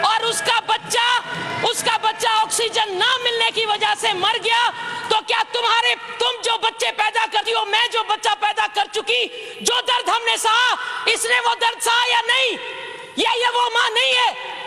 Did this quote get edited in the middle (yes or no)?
no